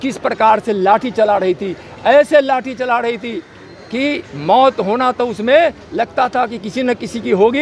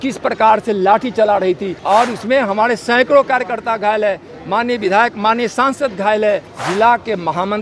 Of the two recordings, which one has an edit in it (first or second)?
second